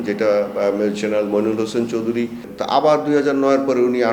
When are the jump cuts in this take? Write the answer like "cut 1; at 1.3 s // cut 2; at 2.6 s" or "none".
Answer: cut 1; at 2.5 s